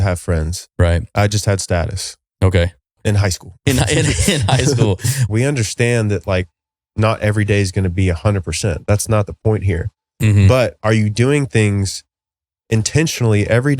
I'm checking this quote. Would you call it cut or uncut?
cut